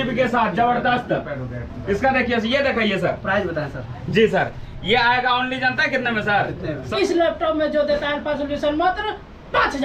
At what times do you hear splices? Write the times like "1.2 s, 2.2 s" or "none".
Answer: 6.9 s